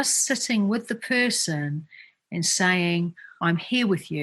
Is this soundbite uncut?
no; 1 cut; at 3.2 s

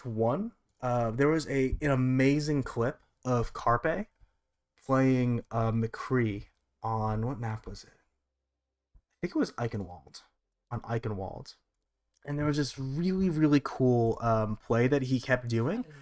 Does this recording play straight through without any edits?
yes; 0 cuts

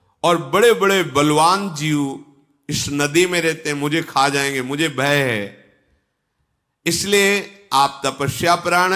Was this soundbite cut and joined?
no; 0 cuts

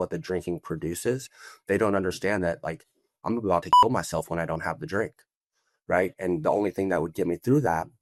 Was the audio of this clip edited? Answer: no; 0 cuts

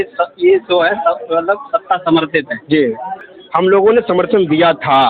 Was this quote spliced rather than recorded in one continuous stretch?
yes; 1 cut; at 3.2 s

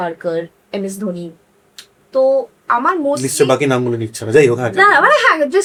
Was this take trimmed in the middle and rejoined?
no; 0 cuts

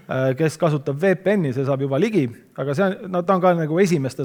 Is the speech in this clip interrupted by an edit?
no; 0 cuts

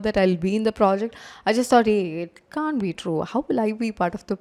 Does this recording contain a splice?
no; 0 cuts

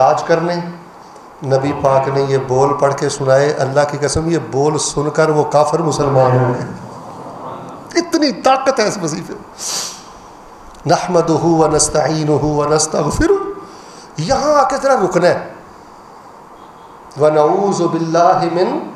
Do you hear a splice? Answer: no; 0 cuts

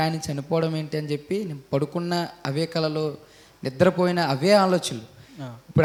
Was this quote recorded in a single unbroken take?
yes; 0 cuts

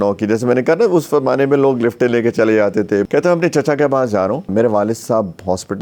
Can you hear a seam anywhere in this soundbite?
yes; 2 cuts; at 3.1 s, 4.5 s

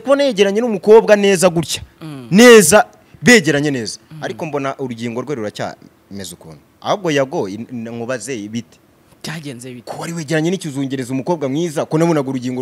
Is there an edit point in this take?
no; 0 cuts

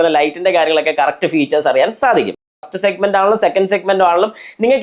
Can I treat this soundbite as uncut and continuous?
no; 1 cut; at 2.5 s

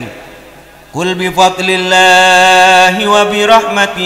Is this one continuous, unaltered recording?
yes; 0 cuts

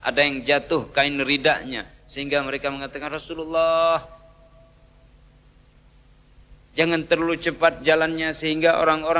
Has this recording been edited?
no; 0 cuts

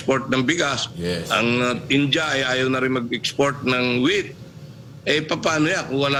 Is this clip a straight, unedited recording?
yes; 0 cuts

